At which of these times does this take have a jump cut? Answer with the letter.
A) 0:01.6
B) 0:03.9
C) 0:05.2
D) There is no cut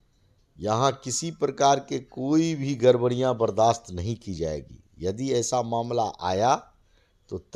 D